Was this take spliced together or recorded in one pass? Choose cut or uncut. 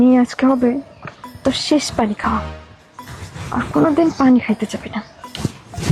uncut